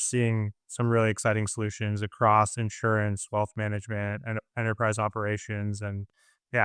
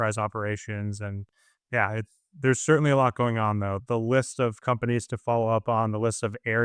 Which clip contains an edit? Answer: second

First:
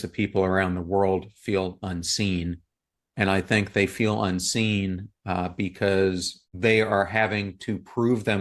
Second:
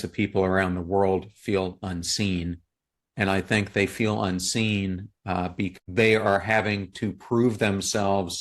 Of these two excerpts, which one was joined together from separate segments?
second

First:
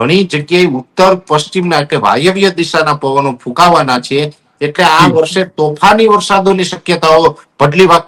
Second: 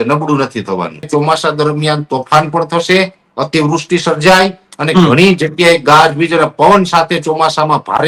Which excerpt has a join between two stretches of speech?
second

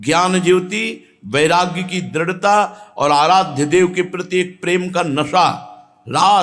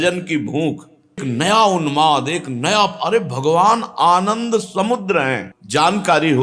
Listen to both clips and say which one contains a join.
second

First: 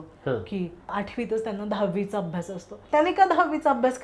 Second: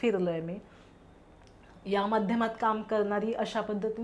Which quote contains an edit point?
first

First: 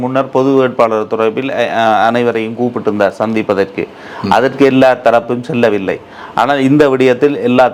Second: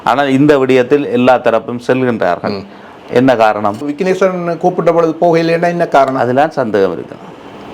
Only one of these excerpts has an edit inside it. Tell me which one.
second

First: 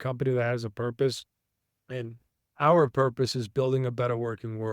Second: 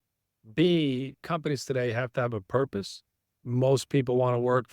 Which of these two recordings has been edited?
second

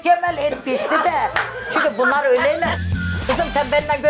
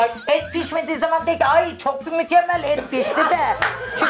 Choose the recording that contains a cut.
first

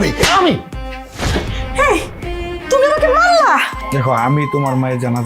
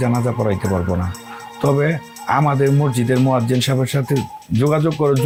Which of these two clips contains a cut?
first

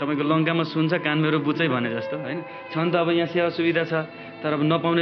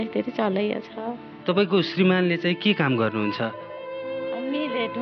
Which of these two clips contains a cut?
second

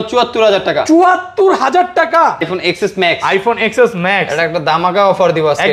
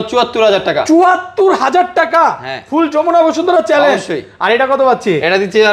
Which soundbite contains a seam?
first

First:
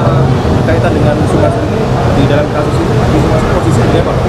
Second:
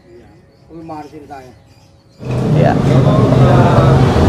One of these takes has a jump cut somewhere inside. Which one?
second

